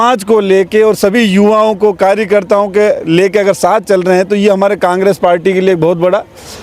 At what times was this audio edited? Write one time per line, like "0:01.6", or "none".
none